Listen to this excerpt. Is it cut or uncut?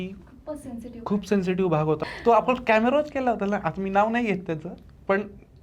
cut